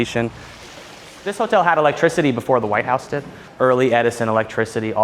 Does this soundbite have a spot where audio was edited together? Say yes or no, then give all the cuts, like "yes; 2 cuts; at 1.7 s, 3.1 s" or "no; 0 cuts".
yes; 2 cuts; at 1.0 s, 3.4 s